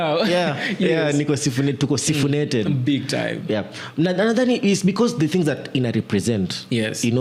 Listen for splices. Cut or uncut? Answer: uncut